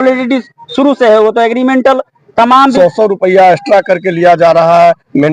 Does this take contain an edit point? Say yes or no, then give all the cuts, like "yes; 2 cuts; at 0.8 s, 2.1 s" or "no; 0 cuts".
yes; 1 cut; at 2.6 s